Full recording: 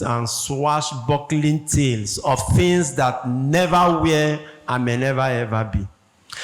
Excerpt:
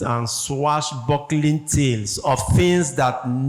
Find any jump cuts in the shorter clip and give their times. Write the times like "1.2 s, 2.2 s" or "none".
none